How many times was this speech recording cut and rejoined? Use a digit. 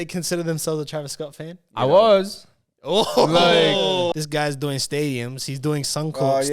1